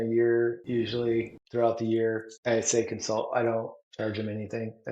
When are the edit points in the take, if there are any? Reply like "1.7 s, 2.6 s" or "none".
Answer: 0.9 s, 2.3 s, 3.8 s